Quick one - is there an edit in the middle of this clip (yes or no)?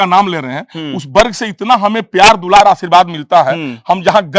no